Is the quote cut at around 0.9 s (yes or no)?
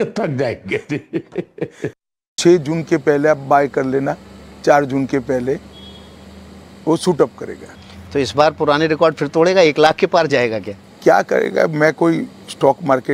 no